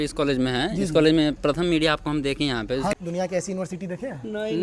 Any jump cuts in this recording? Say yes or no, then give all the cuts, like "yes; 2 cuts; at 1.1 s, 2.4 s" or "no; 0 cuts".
yes; 1 cut; at 2.9 s